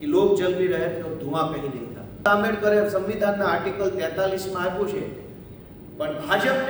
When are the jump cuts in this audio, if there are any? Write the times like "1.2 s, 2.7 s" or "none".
2.2 s